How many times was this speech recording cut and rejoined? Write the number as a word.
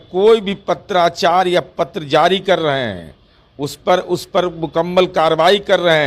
zero